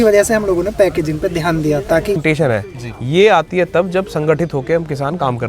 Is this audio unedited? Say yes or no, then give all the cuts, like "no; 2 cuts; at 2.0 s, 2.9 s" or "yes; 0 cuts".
no; 1 cut; at 2.2 s